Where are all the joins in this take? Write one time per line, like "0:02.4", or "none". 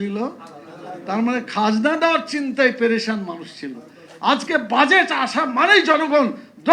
none